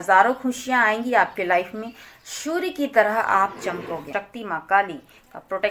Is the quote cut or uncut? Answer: cut